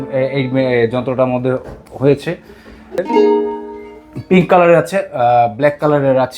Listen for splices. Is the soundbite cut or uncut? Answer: cut